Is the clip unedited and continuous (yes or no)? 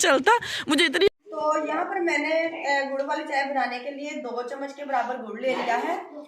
no